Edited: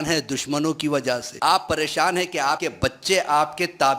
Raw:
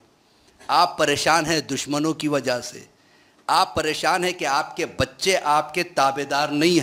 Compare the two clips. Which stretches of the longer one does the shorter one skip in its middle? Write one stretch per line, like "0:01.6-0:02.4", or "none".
0:02.7-0:03.4
0:04.7-0:04.8

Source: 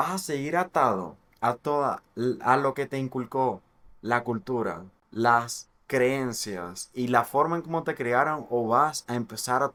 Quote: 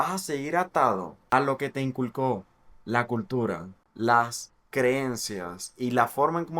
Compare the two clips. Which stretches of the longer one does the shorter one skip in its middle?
0:01.2-0:02.4

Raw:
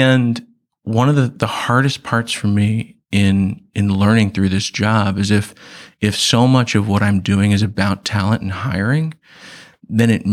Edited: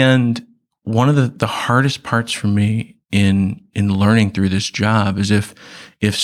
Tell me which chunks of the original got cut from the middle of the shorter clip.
none

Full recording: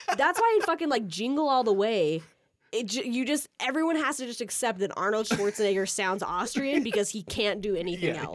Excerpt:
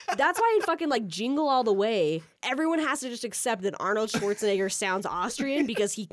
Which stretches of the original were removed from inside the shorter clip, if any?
0:02.4-0:03.5

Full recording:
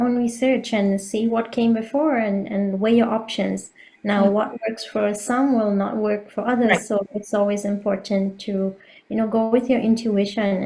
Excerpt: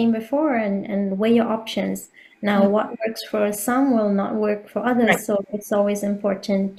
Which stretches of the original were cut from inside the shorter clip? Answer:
none

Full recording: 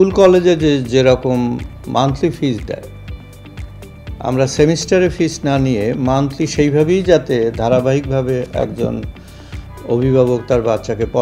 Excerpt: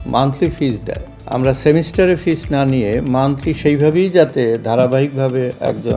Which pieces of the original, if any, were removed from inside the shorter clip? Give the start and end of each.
0:02.9-0:04.0

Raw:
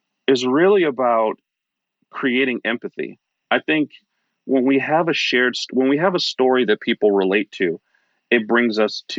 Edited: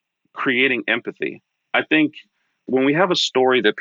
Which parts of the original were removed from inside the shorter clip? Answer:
0:04.3-0:05.6

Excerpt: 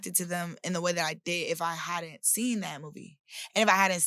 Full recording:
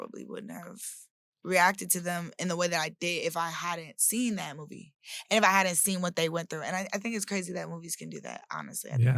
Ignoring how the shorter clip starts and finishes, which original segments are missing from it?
none

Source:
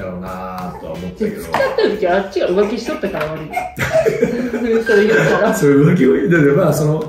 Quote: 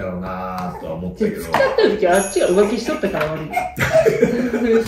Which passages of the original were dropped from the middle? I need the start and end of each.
none

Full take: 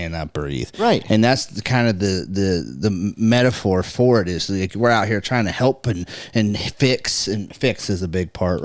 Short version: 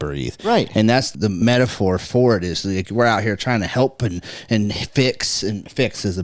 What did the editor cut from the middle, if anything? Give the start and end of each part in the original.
0:01.7-0:03.2

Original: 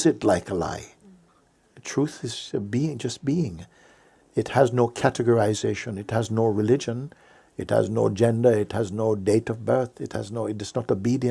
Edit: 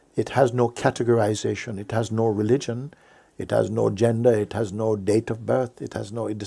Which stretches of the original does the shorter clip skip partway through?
none

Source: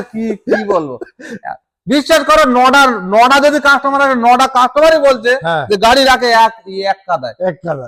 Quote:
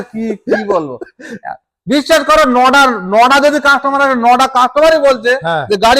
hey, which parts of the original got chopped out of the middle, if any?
none

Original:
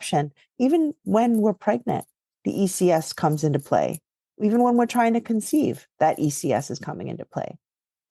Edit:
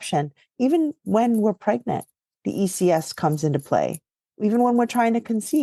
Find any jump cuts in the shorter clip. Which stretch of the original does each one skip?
none

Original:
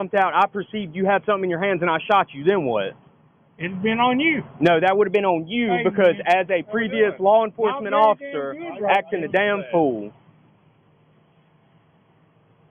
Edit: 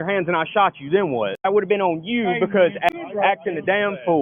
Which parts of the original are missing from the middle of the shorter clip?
0:03.0-0:04.9
0:06.3-0:08.6

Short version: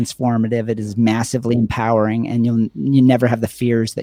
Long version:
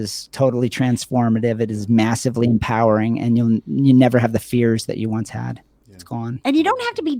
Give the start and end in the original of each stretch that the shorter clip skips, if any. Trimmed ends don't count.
none

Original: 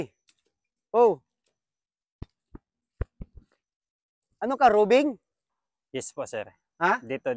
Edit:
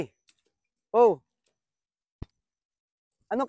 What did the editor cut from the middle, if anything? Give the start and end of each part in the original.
0:02.4-0:03.5

